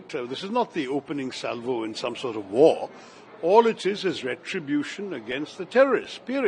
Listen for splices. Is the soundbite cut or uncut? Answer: uncut